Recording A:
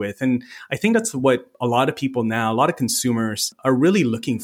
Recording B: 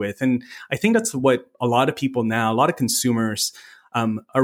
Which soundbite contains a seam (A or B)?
A